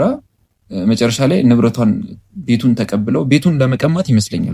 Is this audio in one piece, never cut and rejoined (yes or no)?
yes